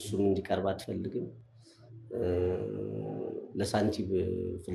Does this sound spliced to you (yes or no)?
no